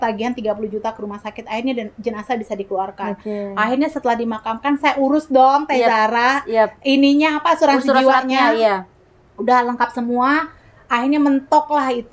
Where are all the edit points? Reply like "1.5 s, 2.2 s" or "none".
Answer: none